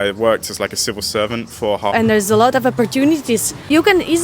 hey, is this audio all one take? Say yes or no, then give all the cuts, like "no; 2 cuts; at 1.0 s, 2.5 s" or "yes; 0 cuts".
no; 1 cut; at 1.9 s